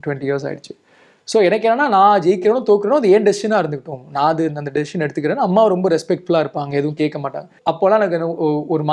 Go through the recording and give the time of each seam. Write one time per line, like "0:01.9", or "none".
0:07.6